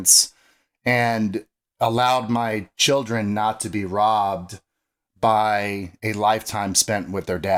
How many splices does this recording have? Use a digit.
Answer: 0